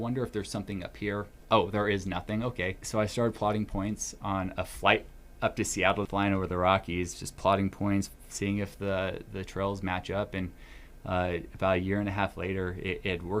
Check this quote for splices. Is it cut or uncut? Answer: cut